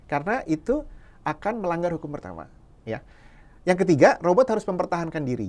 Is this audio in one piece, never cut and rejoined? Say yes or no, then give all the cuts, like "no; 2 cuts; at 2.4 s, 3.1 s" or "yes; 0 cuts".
yes; 0 cuts